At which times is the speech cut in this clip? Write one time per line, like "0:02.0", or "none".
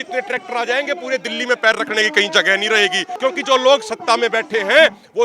0:03.1